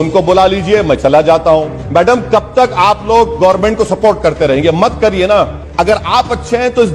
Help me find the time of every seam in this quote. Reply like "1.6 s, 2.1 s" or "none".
1.8 s, 5.6 s